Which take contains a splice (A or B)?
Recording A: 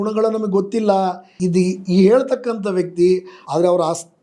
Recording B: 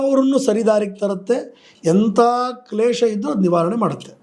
A